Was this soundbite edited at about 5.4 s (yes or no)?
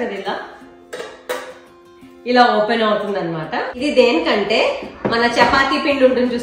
no